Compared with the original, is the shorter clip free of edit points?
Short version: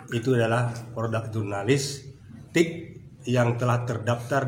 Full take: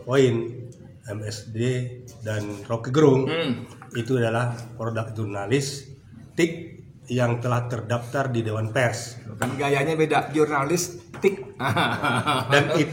yes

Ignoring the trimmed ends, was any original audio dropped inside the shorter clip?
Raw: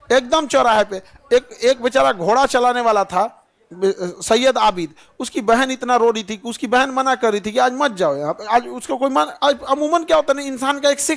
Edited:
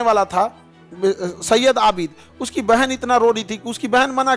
no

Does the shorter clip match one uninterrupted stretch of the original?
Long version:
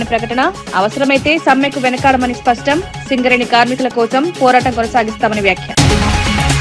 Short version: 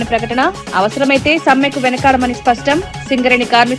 yes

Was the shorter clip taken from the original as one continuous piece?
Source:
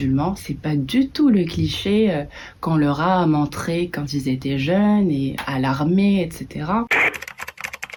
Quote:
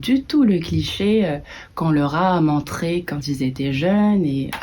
yes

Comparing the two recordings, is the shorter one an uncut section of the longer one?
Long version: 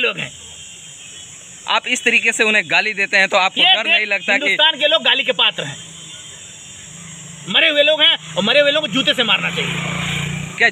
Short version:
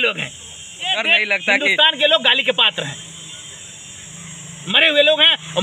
no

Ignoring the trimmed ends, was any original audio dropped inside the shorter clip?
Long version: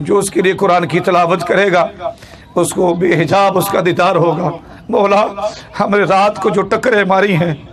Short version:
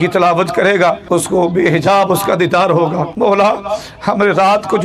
yes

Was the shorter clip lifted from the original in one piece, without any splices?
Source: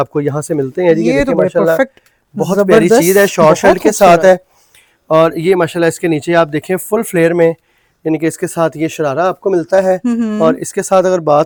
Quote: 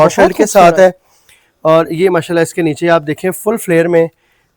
yes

